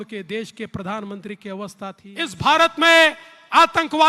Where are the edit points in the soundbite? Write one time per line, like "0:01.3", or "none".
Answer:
0:02.3